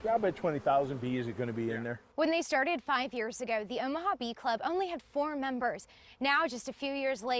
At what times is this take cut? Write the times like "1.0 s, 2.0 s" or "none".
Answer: 2.0 s